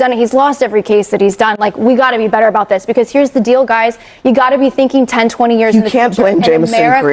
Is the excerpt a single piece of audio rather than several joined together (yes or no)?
yes